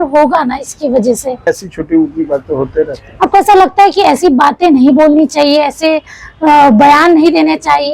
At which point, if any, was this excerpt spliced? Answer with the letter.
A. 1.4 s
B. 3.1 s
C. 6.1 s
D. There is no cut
A